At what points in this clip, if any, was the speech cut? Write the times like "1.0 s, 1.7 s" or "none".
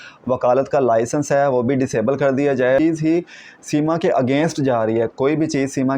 2.8 s